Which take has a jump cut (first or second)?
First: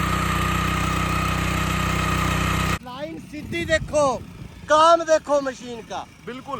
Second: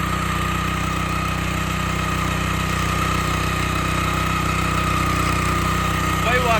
first